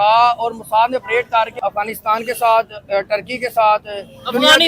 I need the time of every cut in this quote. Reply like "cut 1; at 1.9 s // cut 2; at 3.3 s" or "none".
cut 1; at 1.5 s